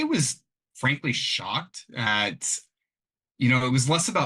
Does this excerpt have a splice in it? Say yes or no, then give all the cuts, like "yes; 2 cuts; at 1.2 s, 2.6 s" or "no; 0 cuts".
yes; 1 cut; at 2.1 s